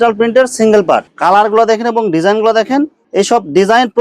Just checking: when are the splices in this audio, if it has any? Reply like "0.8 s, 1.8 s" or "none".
1.1 s